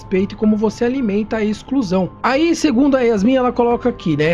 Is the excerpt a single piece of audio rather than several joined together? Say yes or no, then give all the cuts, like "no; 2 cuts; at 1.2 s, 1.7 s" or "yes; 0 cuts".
no; 1 cut; at 2.1 s